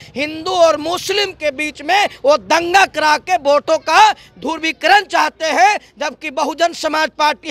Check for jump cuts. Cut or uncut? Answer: uncut